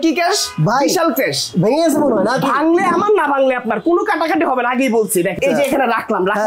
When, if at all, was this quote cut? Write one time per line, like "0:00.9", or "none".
0:05.4